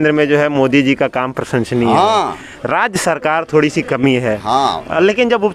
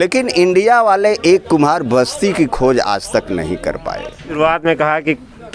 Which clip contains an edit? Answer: second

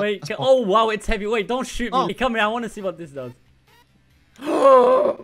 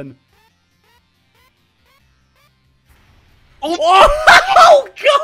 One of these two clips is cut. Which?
first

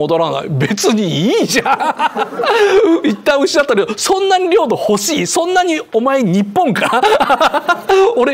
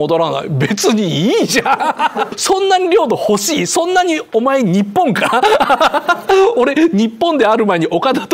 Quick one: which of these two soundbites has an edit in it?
second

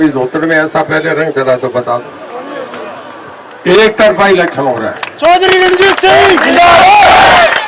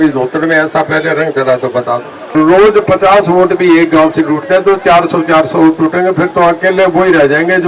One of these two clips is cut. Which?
second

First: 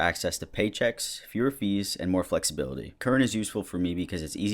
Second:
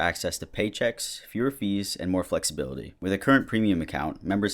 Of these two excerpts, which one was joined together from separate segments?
first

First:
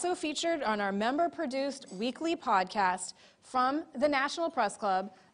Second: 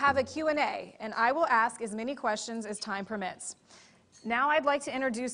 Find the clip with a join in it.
first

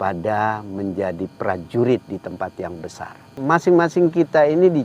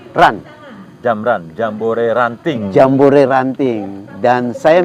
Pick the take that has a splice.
first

